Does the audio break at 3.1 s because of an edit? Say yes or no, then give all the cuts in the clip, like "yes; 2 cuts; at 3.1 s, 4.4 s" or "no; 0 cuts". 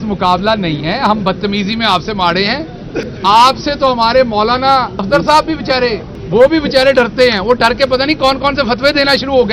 yes; 3 cuts; at 3.1 s, 5.0 s, 6.1 s